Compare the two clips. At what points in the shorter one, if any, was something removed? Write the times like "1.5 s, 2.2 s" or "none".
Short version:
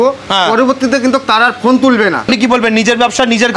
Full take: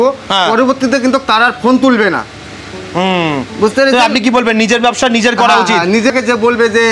2.3 s